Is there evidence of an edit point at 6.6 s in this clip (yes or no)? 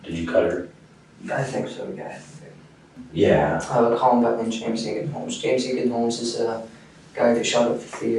no